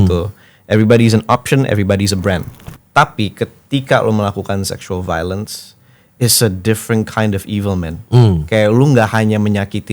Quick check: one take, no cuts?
no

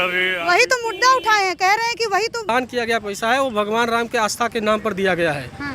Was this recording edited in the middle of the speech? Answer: yes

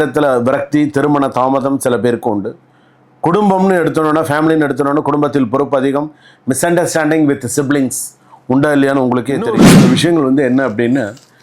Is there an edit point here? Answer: yes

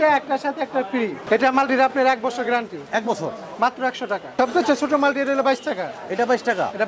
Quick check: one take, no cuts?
no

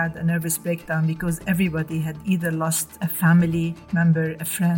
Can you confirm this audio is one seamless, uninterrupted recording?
no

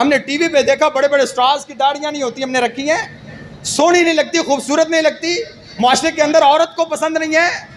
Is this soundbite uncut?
yes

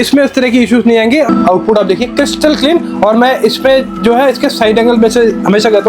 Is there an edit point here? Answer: yes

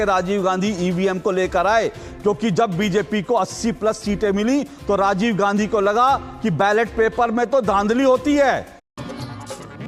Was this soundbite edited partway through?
no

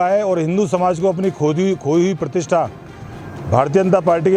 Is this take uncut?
yes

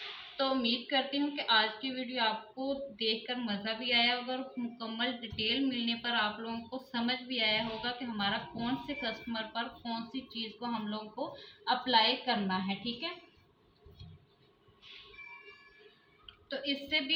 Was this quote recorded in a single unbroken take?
yes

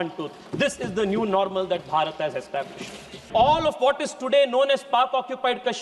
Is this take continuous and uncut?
no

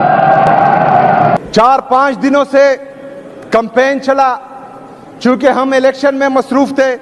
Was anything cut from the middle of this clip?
yes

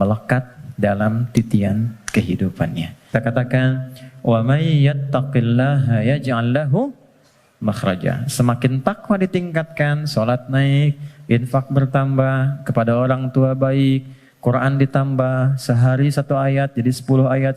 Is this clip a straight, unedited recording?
no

